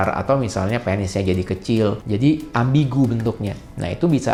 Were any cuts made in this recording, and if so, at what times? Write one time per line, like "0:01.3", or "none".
none

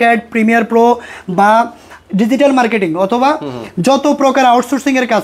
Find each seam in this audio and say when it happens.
none

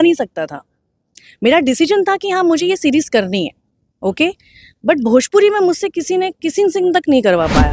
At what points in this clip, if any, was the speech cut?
none

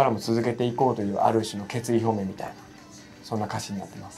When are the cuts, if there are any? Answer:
none

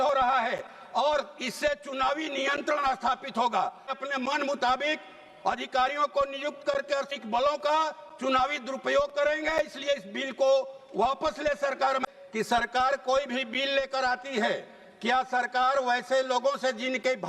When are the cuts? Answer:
0:03.9
0:07.1
0:12.0

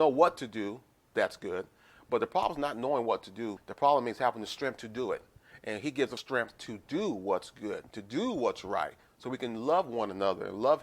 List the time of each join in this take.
0:03.6
0:06.2

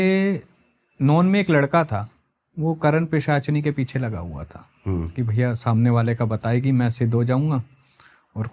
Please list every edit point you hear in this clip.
none

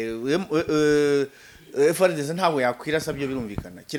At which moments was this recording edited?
none

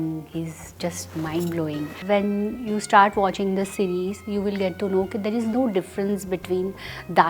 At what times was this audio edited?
0:02.0

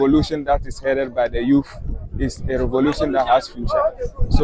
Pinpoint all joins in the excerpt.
none

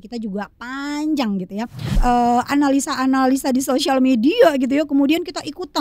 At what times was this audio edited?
0:02.0

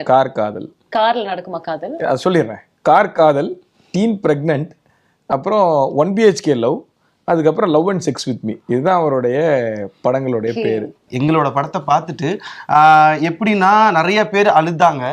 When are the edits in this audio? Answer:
0:11.1

